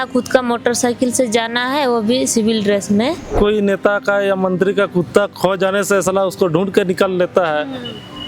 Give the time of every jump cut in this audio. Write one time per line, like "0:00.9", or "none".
0:03.3